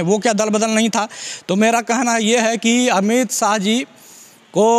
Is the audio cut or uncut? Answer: uncut